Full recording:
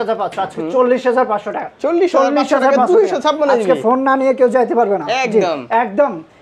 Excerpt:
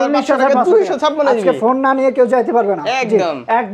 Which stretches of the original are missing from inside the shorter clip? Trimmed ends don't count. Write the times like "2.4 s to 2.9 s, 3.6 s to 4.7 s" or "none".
none